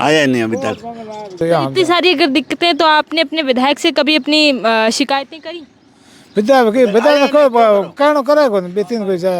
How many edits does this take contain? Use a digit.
1